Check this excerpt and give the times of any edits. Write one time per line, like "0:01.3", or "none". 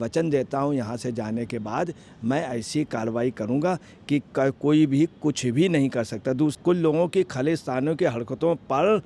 0:06.5